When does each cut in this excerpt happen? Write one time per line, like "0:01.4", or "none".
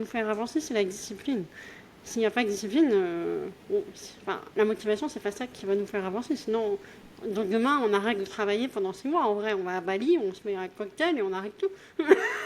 none